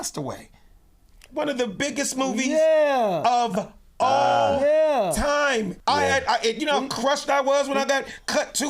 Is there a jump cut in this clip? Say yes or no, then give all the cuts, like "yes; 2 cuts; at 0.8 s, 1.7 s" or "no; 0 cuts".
yes; 1 cut; at 5.7 s